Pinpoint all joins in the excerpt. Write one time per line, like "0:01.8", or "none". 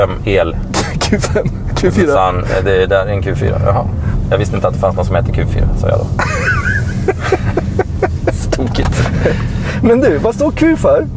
none

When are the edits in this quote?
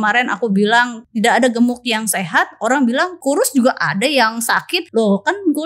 0:01.0
0:03.1
0:04.8

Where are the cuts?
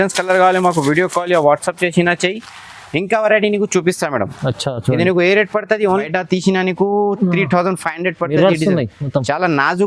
0:06.0

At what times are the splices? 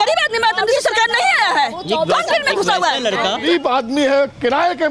0:03.4

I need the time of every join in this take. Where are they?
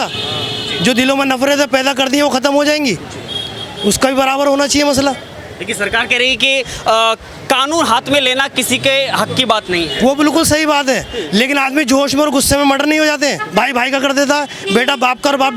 none

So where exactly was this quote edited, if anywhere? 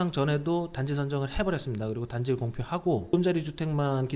0:03.1

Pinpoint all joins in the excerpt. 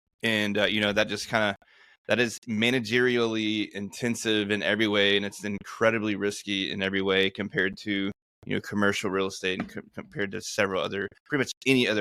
none

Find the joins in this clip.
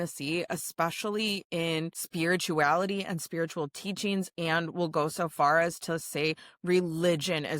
0:02.0

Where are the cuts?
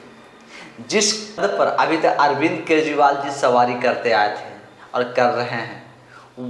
0:01.4

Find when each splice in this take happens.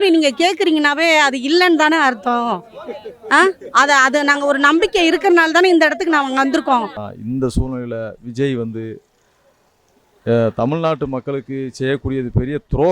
0:07.1

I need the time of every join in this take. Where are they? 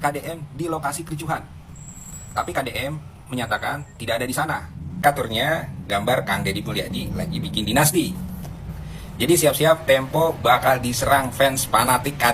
0:05.0

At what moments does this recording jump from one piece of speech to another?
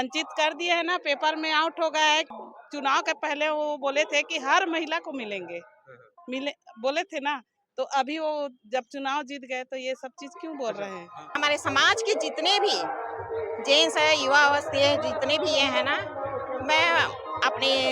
0:02.4
0:11.3

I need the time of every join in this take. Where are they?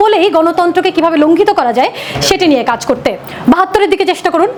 none

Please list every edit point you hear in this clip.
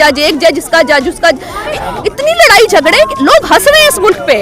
0:01.6

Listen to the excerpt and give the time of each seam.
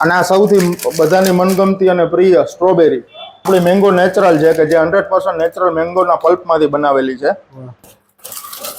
0:03.5
0:07.9

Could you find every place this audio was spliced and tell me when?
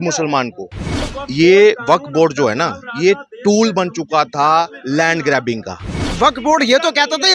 0:01.2
0:06.1

